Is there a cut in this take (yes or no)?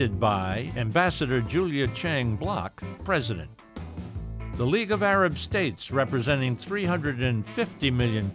no